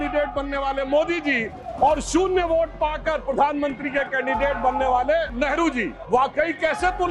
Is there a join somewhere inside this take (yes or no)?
yes